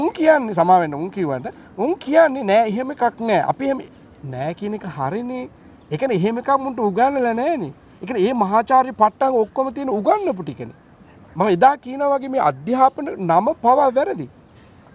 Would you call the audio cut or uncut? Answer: uncut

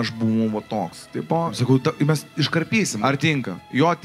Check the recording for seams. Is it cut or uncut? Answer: cut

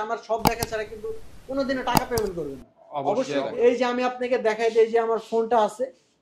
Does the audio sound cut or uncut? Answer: cut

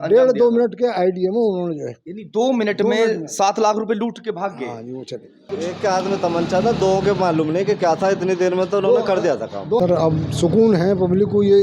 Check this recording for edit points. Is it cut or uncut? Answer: cut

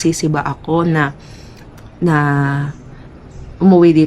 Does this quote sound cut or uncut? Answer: uncut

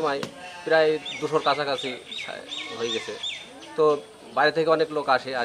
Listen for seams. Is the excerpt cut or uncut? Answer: uncut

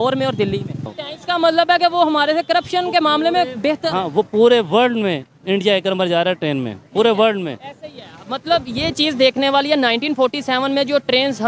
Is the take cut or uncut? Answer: cut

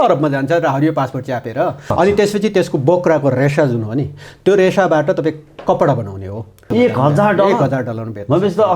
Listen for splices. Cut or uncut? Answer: cut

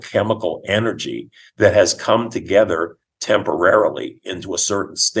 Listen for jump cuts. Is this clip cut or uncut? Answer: uncut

